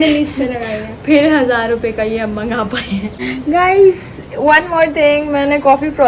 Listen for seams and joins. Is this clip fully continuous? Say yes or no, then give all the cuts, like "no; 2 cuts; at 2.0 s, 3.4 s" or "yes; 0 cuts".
no; 1 cut; at 3.2 s